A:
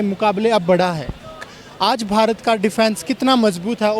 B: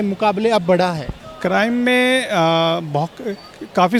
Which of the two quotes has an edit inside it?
A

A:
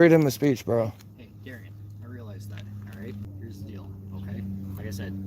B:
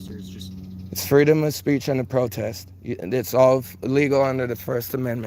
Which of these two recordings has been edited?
A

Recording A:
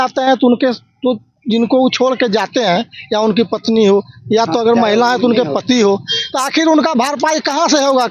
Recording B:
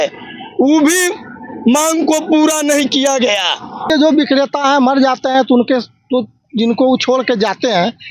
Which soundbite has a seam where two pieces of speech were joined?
B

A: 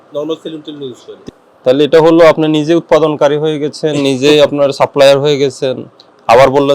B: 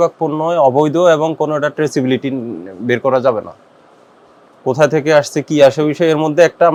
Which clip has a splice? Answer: A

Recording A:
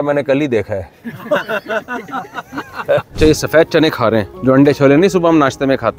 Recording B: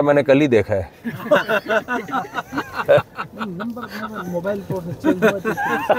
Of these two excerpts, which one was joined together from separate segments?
A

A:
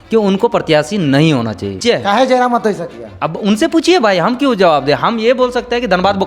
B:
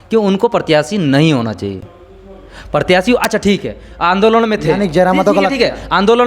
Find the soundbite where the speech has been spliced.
A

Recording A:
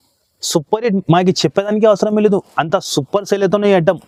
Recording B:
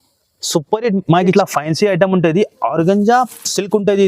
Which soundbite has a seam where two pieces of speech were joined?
B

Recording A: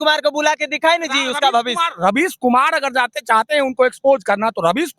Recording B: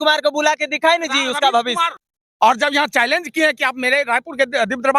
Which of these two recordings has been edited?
B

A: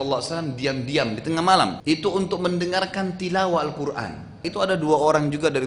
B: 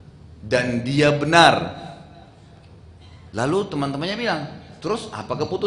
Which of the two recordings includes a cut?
A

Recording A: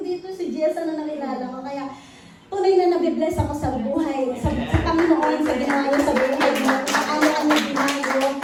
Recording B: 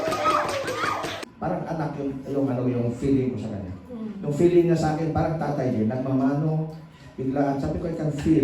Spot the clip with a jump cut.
B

